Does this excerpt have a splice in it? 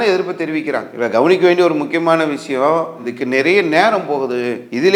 no; 0 cuts

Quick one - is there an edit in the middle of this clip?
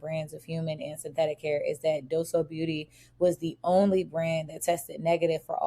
no; 0 cuts

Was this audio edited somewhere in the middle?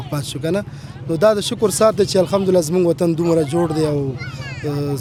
no; 0 cuts

